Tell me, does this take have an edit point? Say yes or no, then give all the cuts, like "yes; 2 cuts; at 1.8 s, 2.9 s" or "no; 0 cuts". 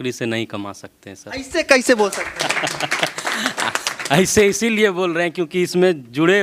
no; 0 cuts